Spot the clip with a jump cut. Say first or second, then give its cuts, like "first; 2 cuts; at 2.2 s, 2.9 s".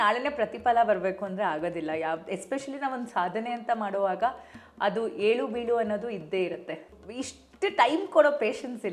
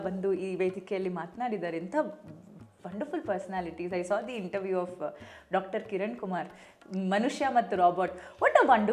first; 1 cut; at 6.9 s